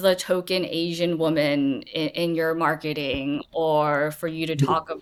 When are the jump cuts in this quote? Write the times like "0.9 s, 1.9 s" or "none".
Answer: none